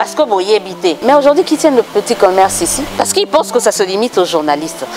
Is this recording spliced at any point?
yes; 2 cuts; at 1.0 s, 2.9 s

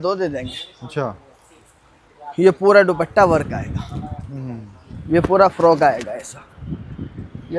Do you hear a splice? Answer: yes; 1 cut; at 4.9 s

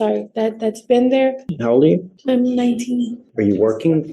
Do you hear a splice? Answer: yes; 3 cuts; at 1.5 s, 2.1 s, 3.2 s

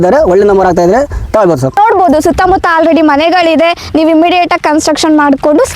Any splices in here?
yes; 1 cut; at 1.8 s

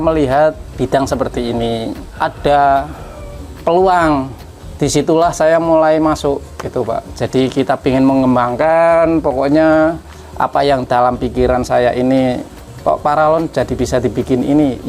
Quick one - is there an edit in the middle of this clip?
no; 0 cuts

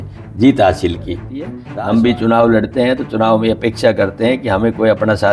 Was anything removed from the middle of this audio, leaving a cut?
yes; 1 cut; at 1.6 s

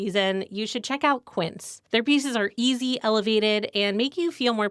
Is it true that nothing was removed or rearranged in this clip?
yes; 0 cuts

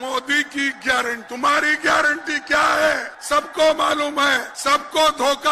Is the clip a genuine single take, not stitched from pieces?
no; 3 cuts; at 1.2 s, 3.1 s, 4.5 s

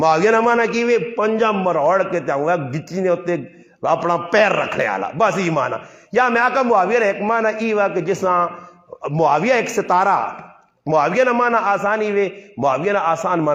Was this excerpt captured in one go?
yes; 0 cuts

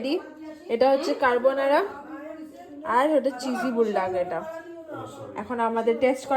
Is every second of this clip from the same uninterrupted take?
yes; 0 cuts

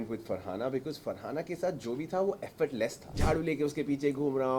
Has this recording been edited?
yes; 1 cut; at 3.2 s

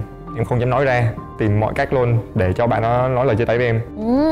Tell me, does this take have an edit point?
yes; 1 cut; at 1.3 s

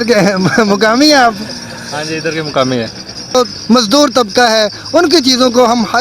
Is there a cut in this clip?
yes; 1 cut; at 3.3 s

